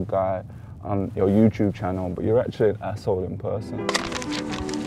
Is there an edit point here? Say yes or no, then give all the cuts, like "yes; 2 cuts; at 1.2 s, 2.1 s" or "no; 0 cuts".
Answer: no; 0 cuts